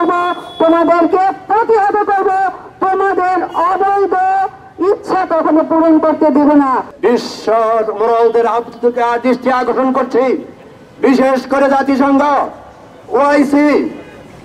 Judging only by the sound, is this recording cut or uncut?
cut